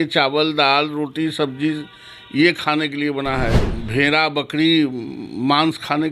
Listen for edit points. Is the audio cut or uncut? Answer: cut